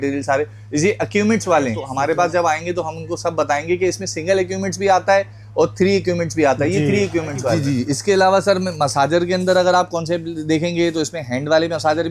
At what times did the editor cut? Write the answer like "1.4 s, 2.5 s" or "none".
1.8 s, 7.6 s